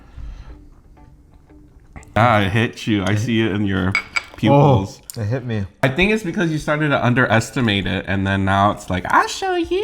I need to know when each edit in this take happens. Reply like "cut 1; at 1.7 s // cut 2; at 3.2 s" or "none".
cut 1; at 2.2 s // cut 2; at 5.8 s